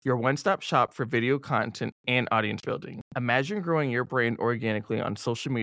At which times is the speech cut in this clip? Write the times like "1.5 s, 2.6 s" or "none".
none